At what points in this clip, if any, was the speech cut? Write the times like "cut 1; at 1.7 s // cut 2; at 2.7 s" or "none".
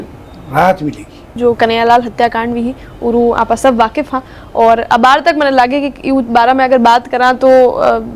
cut 1; at 1.3 s